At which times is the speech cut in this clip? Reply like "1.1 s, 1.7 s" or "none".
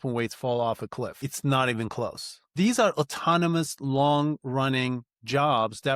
1.2 s, 2.5 s